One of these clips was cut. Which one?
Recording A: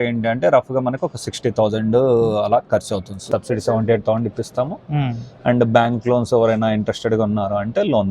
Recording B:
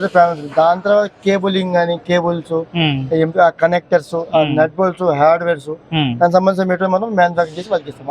A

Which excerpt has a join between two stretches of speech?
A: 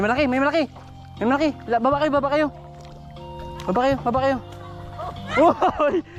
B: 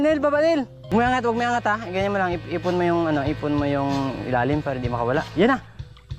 B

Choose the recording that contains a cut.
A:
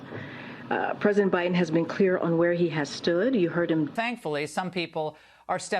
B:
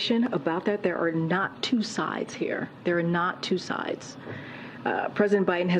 A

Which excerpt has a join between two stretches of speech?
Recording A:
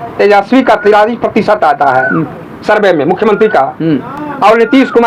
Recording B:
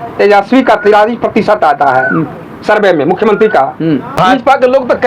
B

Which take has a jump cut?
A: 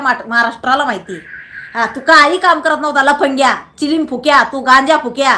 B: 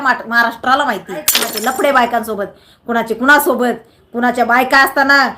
B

